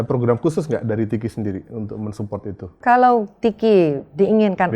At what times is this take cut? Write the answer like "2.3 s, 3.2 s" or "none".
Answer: 2.8 s

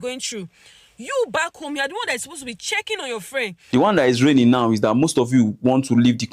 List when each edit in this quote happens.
3.7 s

